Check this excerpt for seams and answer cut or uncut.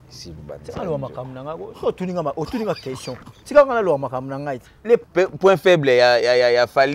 cut